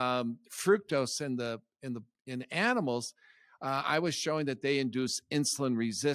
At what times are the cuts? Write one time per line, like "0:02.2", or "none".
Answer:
none